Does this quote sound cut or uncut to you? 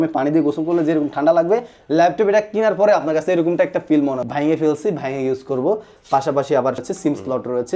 cut